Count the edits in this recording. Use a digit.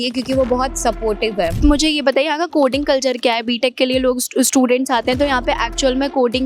1